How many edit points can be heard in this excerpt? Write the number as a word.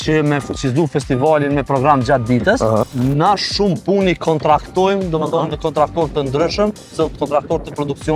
one